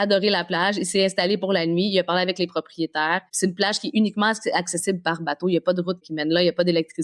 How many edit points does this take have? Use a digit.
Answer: 2